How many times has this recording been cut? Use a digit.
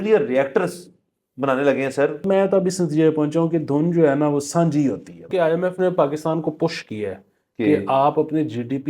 2